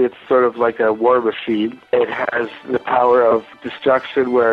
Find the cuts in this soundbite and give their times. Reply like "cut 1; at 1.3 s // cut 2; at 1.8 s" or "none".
cut 1; at 1.9 s // cut 2; at 3.5 s

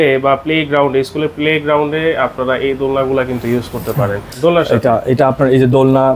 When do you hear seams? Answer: cut 1; at 4.2 s

